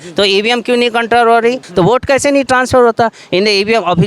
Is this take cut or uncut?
cut